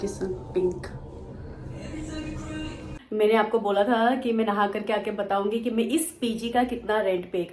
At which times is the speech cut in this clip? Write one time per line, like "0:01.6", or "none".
0:02.9